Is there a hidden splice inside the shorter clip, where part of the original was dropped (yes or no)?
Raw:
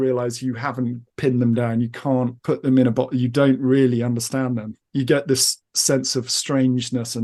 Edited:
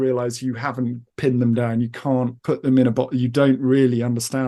no